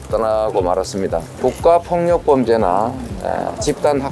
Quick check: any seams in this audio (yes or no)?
yes